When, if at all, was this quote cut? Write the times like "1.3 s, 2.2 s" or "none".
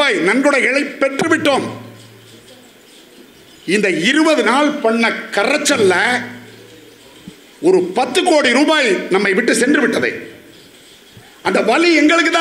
none